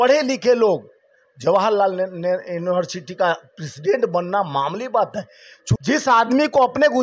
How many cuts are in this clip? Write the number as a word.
one